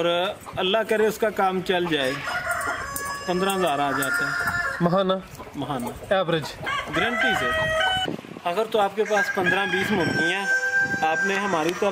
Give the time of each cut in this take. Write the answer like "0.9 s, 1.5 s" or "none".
8.0 s